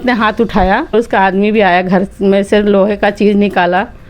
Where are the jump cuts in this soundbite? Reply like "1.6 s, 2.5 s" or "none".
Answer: 0.9 s